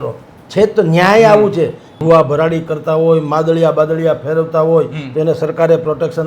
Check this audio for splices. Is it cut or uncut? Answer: cut